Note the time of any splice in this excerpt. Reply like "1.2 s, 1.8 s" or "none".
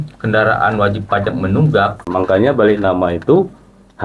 2.1 s